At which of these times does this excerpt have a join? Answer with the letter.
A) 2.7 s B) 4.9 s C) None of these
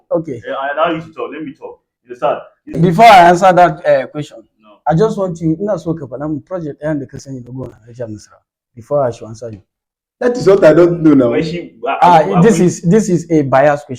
A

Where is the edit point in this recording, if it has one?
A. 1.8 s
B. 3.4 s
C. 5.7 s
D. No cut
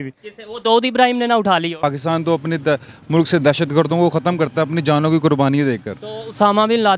A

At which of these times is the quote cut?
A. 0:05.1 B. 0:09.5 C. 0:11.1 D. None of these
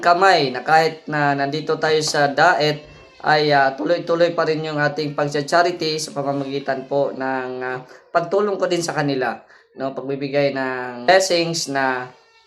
D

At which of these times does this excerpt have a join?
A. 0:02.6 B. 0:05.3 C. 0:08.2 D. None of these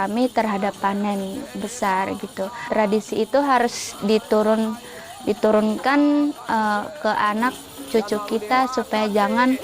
A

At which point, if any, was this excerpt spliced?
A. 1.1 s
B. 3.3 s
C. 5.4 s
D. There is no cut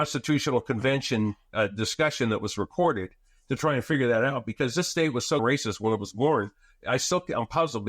C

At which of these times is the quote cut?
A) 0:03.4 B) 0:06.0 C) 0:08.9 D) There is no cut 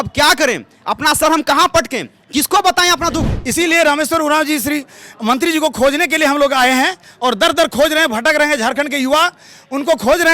A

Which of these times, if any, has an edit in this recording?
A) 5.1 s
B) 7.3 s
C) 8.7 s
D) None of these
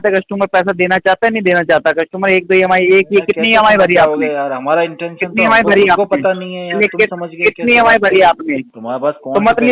C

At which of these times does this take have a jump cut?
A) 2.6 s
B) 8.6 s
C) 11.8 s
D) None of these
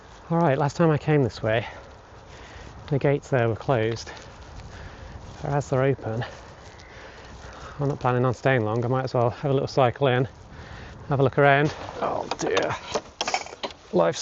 C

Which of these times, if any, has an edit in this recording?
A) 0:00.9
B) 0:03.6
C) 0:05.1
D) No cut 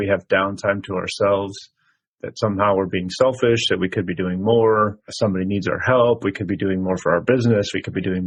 D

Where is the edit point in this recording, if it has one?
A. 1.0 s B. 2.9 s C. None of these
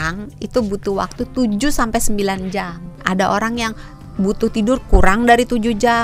B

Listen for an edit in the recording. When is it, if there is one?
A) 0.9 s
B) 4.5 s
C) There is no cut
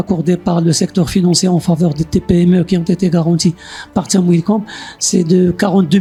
C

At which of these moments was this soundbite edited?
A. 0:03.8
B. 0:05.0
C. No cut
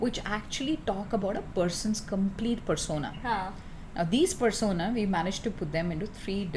C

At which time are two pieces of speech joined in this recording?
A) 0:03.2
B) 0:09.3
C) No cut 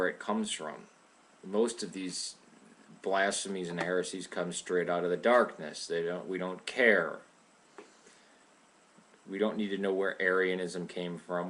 B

